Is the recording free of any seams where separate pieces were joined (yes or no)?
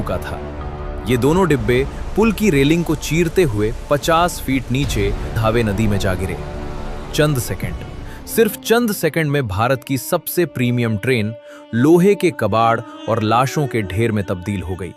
no